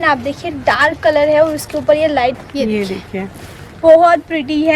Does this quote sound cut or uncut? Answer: cut